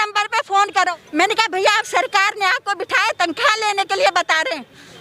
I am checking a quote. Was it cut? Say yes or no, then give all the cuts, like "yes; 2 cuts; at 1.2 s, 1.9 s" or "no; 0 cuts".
yes; 1 cut; at 1.0 s